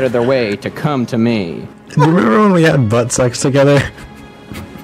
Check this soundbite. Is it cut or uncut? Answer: cut